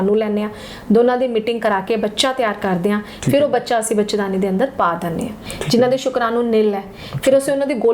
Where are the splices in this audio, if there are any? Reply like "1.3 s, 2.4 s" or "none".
5.3 s